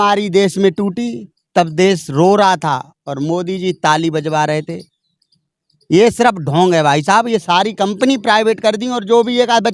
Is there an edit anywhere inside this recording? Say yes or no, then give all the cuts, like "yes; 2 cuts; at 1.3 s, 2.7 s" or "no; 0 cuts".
no; 0 cuts